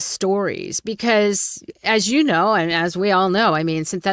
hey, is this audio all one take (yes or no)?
yes